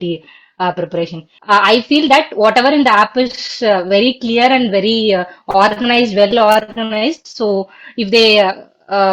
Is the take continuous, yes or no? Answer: no